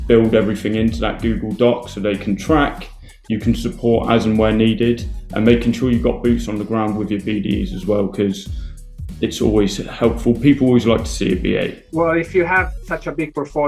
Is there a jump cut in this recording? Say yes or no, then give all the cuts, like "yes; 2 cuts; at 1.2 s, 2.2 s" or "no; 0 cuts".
yes; 1 cut; at 11.8 s